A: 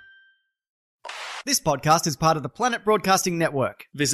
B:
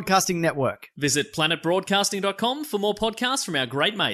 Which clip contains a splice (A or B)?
A